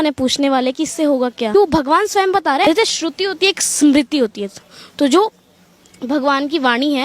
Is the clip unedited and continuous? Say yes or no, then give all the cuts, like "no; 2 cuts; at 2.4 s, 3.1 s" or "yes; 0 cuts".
no; 2 cuts; at 1.5 s, 2.6 s